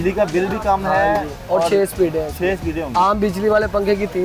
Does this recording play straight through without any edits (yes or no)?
yes